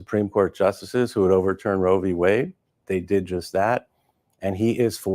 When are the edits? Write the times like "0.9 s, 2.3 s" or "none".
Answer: 3.8 s